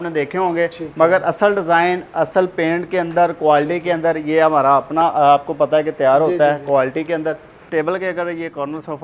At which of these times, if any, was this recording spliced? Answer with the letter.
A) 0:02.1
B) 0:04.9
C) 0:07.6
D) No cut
C